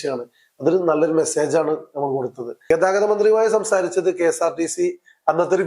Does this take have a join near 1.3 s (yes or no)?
no